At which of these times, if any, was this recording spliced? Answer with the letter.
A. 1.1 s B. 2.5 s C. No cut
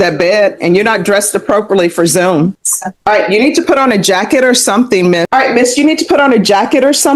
C